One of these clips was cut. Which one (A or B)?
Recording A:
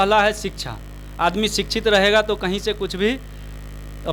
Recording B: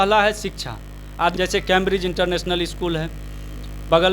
B